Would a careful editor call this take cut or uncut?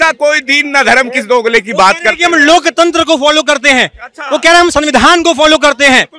uncut